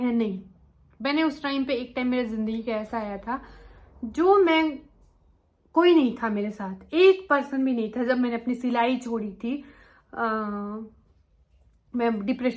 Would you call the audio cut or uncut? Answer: uncut